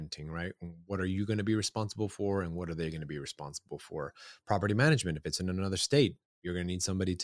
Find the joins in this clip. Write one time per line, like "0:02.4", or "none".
none